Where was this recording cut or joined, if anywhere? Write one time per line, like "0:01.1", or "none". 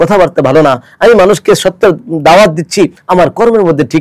0:03.0